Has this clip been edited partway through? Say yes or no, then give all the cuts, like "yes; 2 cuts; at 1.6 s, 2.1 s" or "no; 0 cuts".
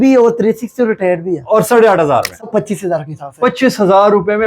yes; 1 cut; at 2.4 s